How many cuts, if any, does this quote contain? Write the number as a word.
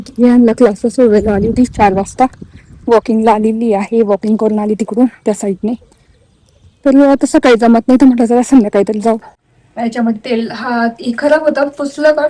one